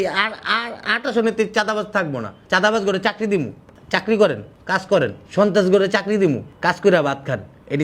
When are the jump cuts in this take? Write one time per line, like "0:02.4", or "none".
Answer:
0:06.5